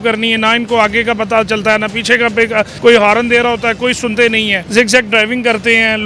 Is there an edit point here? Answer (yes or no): yes